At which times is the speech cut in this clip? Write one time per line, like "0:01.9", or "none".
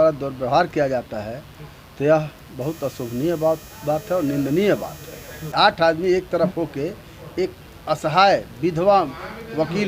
0:05.4